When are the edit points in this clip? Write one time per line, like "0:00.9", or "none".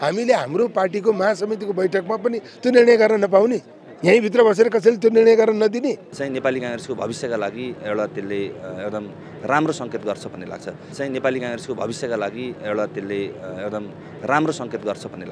0:06.1
0:11.0